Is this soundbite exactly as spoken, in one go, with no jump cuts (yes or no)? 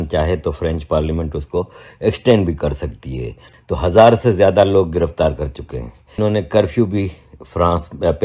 yes